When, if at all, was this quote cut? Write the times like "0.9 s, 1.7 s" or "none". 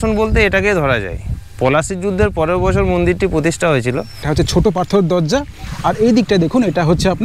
4.3 s